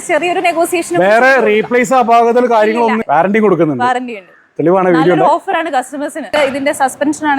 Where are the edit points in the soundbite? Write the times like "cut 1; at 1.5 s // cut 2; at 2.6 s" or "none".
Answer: cut 1; at 3.0 s // cut 2; at 6.3 s

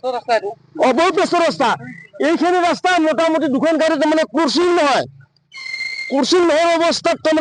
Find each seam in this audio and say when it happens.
cut 1; at 3.8 s

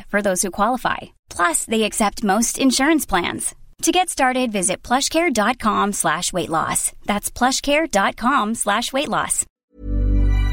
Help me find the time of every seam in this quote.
cut 1; at 9.5 s

